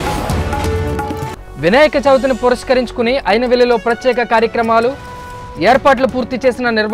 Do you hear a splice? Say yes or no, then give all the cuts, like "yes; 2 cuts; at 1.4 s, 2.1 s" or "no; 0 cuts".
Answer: yes; 1 cut; at 1.3 s